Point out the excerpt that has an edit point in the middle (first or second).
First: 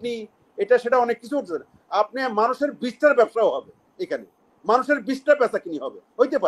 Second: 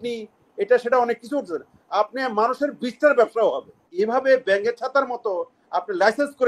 second